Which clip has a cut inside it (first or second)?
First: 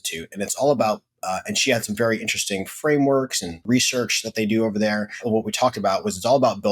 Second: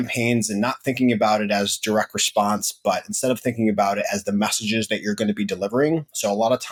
first